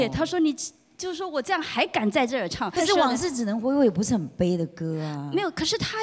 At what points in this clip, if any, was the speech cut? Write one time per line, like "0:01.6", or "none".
0:02.8